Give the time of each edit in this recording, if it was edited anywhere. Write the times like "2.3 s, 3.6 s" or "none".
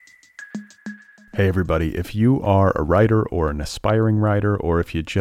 0.9 s